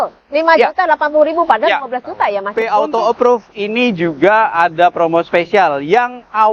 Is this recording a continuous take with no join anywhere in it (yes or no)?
no